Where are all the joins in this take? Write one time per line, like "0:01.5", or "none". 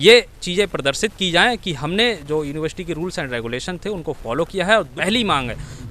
0:04.9